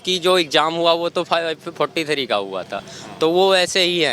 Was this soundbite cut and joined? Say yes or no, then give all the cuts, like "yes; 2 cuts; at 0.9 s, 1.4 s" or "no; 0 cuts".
no; 0 cuts